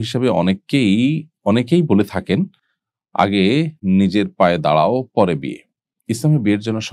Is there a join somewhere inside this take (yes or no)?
no